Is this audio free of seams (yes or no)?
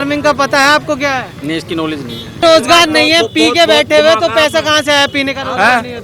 no